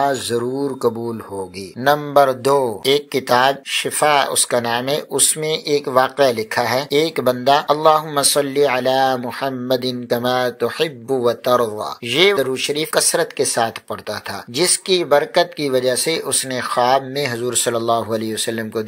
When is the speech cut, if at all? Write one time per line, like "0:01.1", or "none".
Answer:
none